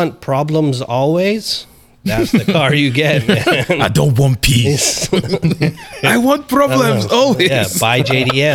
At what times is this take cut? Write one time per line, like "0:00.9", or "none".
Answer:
none